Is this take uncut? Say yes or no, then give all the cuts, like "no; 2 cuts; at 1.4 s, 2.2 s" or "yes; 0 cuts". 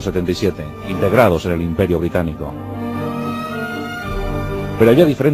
no; 1 cut; at 3.1 s